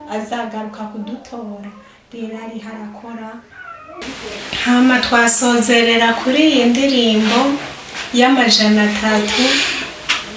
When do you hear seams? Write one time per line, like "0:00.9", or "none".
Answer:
0:04.0